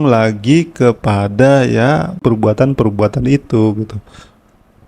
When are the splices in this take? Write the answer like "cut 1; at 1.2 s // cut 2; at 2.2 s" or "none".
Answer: cut 1; at 2.2 s